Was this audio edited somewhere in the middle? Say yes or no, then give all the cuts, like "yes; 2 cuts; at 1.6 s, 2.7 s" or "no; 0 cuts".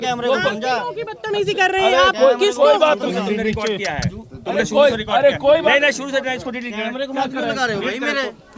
no; 0 cuts